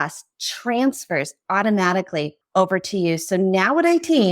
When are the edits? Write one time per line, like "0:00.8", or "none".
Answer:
0:02.4